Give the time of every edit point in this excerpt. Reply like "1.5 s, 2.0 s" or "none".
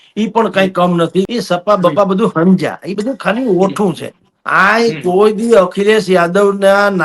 1.3 s